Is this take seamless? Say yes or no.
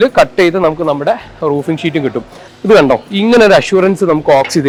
yes